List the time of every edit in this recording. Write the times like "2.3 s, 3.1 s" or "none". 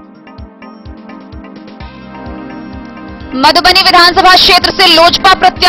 2.8 s